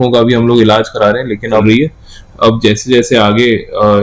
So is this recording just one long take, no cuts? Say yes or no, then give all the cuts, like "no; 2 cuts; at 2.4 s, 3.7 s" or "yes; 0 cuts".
no; 1 cut; at 1.6 s